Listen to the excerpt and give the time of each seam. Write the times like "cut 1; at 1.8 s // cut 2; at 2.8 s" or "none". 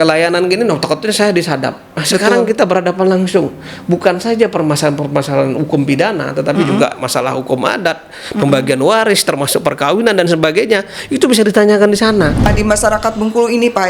cut 1; at 12.5 s